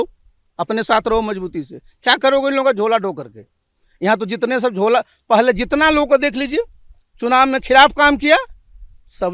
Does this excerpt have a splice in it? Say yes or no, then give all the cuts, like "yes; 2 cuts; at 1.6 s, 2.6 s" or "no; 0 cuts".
no; 0 cuts